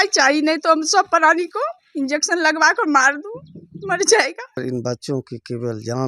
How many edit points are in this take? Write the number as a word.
one